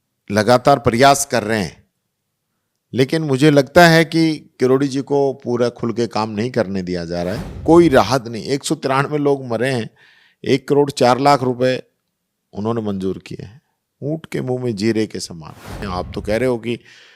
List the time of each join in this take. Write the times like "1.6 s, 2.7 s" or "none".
7.5 s, 15.9 s